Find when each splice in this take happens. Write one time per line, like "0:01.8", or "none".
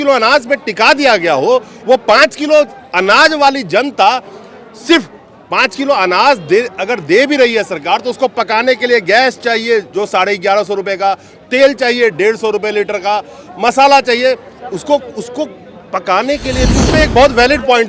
0:16.9